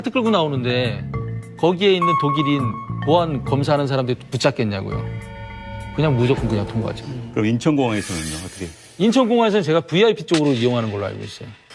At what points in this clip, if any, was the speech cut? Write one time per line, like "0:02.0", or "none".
none